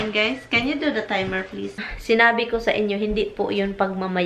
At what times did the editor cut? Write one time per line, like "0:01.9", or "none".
0:01.9